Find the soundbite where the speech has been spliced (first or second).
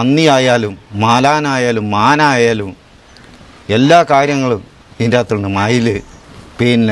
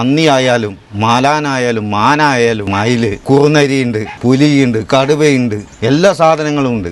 second